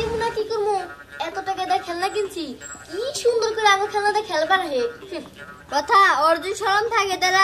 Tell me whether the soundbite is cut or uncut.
uncut